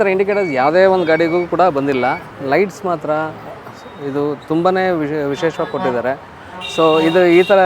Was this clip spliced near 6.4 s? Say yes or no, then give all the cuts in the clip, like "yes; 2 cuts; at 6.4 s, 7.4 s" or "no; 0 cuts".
no; 1 cut; at 2.3 s